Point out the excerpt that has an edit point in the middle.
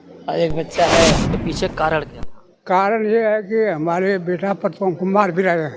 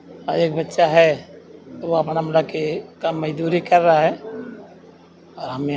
first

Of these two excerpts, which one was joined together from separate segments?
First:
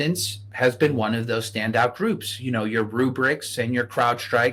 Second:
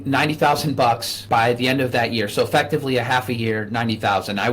second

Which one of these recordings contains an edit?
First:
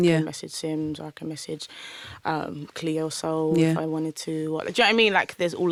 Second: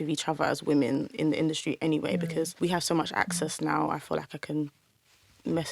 second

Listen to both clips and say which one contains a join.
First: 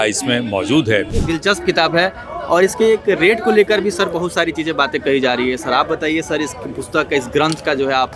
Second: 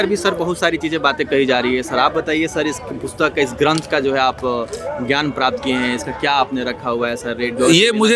first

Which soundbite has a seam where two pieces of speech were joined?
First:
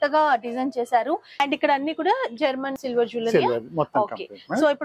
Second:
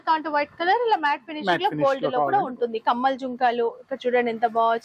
first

